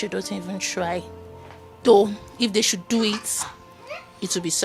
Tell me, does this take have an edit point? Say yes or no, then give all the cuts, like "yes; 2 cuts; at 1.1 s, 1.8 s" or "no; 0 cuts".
no; 0 cuts